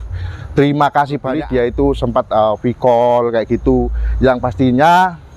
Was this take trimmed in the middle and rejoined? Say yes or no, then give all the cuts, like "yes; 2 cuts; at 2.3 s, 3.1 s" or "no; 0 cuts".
yes; 1 cut; at 1.3 s